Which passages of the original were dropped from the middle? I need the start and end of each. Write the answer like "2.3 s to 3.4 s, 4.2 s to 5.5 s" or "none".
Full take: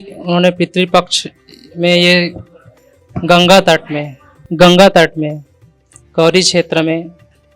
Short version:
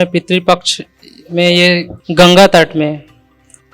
2.4 s to 4.4 s